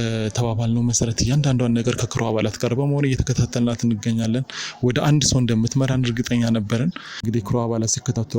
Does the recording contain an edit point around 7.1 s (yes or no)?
yes